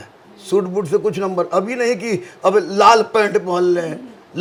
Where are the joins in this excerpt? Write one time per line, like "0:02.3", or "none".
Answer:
none